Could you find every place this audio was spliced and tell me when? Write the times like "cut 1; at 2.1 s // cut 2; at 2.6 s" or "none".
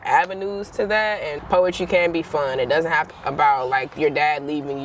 cut 1; at 1.3 s // cut 2; at 3.1 s